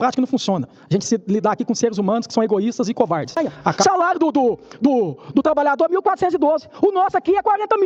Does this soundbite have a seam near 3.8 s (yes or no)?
yes